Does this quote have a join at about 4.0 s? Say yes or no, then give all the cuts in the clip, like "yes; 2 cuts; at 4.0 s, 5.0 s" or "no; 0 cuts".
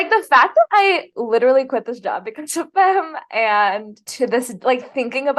yes; 1 cut; at 4.0 s